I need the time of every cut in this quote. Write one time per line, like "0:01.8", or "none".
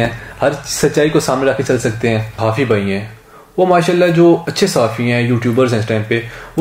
0:02.4